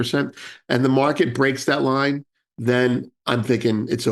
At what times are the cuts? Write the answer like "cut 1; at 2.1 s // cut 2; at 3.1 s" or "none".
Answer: cut 1; at 3.1 s